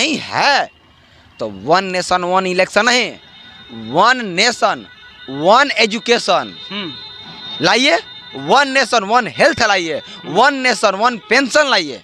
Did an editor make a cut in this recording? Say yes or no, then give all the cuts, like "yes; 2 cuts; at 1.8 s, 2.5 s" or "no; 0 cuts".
no; 0 cuts